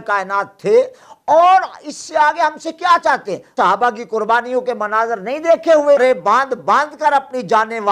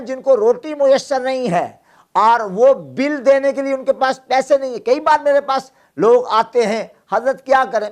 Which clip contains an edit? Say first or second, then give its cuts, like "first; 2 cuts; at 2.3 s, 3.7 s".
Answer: first; 2 cuts; at 3.5 s, 6.0 s